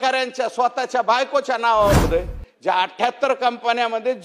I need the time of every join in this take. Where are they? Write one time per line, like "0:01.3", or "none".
0:02.1